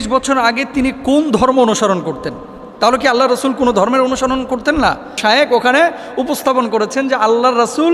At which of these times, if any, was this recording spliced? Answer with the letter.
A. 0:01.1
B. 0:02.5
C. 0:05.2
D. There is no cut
C